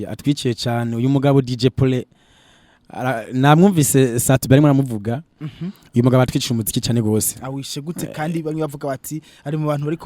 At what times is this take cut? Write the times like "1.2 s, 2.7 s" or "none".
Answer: none